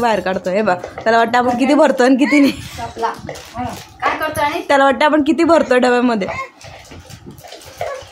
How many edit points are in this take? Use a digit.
0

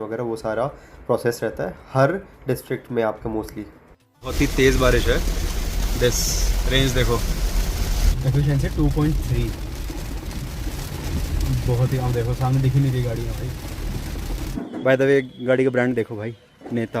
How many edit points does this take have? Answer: 3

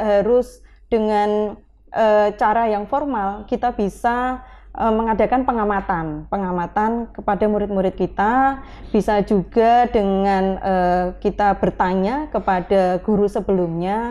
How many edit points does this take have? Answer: 0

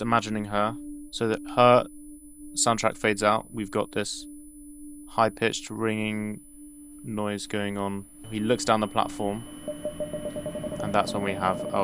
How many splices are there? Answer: 1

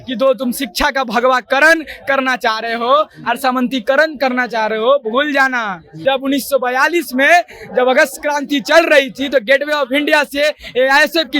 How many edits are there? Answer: 1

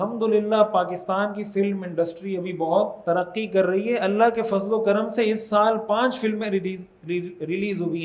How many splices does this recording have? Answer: 1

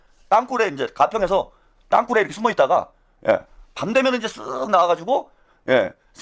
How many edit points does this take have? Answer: 0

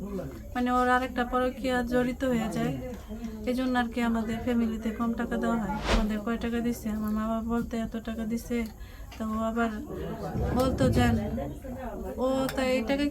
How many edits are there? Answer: 1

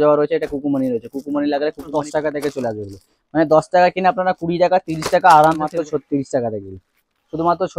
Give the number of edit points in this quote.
2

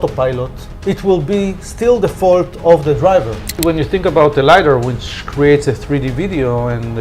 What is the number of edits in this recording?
1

